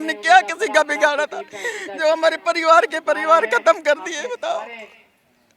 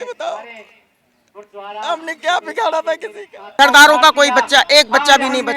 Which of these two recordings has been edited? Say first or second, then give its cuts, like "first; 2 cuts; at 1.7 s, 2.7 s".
second; 1 cut; at 3.5 s